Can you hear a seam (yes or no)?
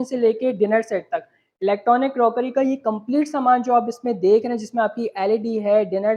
no